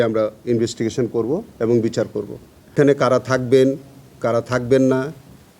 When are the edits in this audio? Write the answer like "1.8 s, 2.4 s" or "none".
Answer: 2.7 s

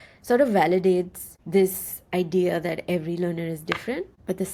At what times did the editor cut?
none

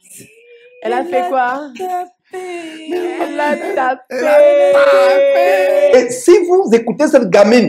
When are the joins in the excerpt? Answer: 5.9 s

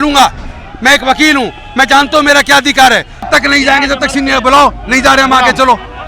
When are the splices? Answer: 3.2 s

